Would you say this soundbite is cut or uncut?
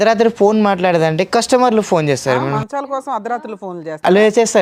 uncut